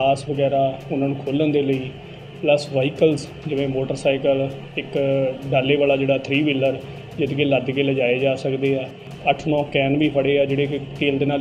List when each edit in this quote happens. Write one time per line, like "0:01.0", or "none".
0:09.1